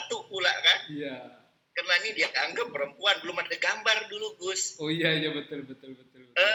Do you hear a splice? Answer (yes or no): no